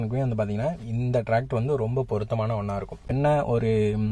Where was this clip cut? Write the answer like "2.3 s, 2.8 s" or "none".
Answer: 3.1 s